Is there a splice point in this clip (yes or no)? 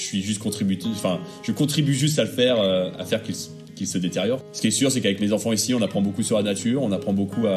yes